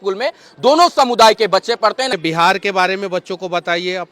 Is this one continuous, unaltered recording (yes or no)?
no